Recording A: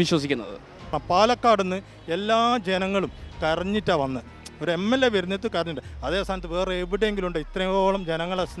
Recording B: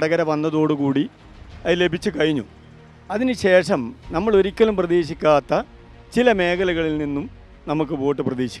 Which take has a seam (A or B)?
A